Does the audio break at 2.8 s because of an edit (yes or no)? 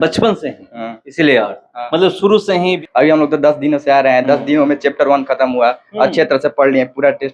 yes